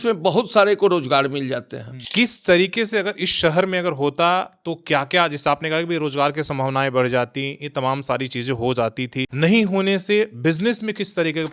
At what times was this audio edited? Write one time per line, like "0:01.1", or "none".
0:01.9
0:09.2